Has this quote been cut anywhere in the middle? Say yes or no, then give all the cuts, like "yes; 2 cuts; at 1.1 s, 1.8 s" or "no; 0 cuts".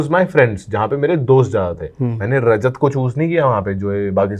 no; 0 cuts